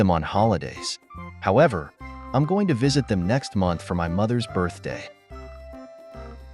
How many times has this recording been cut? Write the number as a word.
one